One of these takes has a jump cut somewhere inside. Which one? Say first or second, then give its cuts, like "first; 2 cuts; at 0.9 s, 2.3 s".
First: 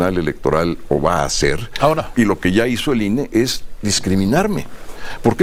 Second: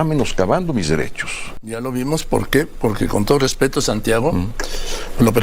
second; 1 cut; at 1.8 s